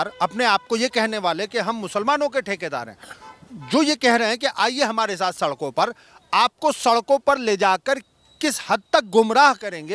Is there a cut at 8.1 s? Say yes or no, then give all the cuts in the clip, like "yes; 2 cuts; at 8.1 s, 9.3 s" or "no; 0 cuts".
no; 0 cuts